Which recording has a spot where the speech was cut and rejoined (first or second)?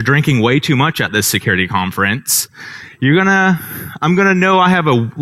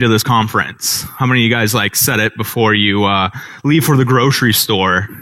second